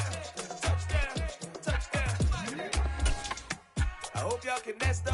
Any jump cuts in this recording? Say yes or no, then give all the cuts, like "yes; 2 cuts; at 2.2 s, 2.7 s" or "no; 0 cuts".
yes; 1 cut; at 3.6 s